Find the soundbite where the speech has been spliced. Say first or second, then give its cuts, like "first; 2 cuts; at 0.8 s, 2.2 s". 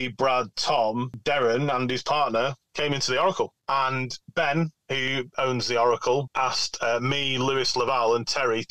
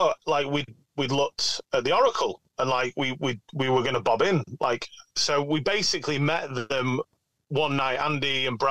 first; 4 cuts; at 1.2 s, 3.8 s, 5.3 s, 6.3 s